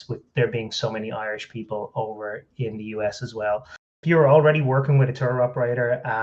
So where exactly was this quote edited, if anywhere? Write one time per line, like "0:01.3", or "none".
0:03.9